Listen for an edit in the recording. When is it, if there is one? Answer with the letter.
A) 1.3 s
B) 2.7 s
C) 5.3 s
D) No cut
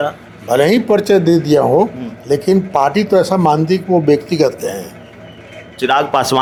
D